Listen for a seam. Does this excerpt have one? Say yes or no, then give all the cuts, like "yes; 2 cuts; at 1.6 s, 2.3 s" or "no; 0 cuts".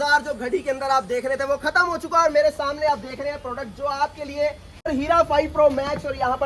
yes; 1 cut; at 4.9 s